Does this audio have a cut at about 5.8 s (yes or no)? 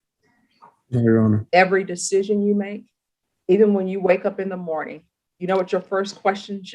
no